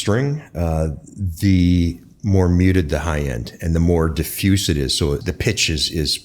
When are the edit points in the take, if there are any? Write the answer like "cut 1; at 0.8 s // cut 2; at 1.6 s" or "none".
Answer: cut 1; at 5.2 s